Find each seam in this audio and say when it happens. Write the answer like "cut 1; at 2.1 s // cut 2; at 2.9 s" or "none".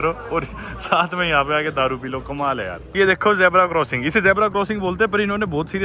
cut 1; at 2.9 s